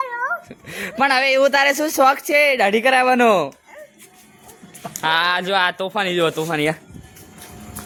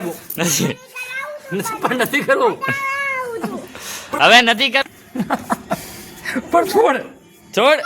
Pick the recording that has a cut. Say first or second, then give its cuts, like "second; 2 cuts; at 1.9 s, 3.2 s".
second; 1 cut; at 4.8 s